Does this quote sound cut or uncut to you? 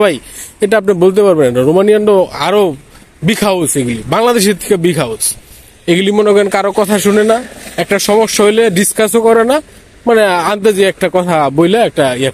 uncut